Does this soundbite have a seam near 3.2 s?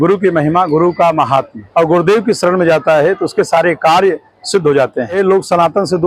no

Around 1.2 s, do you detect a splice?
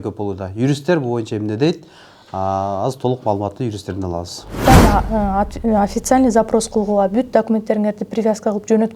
no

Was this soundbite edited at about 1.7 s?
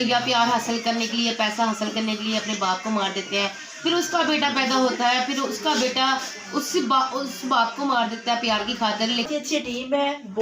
no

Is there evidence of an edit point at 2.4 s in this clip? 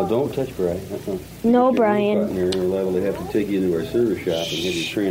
yes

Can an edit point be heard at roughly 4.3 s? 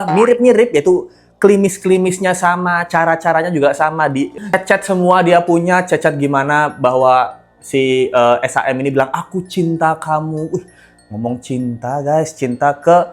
yes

